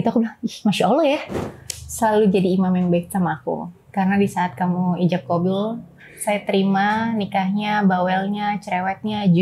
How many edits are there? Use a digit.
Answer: 1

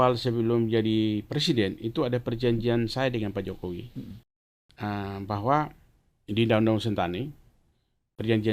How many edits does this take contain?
0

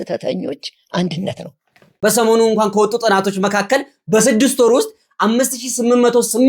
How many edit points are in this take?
1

